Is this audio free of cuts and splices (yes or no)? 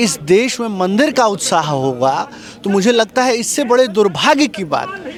yes